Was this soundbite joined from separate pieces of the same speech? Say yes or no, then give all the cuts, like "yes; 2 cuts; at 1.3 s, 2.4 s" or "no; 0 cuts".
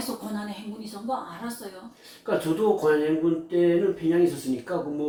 no; 0 cuts